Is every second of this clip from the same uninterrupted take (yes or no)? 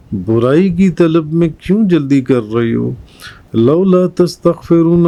yes